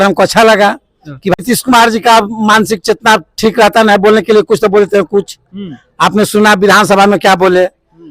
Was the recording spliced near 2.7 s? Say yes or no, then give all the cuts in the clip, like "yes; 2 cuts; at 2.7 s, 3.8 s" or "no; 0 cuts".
no; 1 cut; at 1.4 s